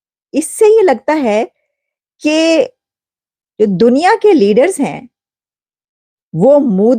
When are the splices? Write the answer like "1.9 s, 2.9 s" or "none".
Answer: none